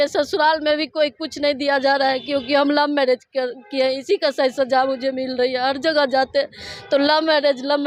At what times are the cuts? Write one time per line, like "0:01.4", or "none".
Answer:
none